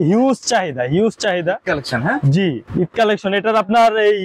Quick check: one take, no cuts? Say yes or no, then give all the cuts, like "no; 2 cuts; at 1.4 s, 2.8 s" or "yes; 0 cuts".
yes; 0 cuts